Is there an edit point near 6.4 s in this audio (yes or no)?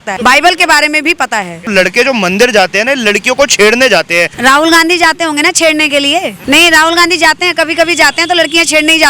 yes